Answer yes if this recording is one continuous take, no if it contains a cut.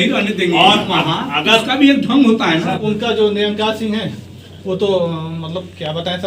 no